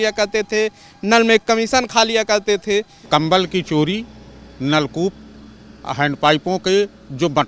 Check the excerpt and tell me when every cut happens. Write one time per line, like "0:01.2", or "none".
0:03.0